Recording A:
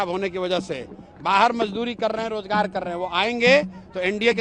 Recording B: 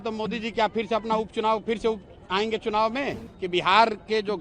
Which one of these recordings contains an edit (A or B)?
B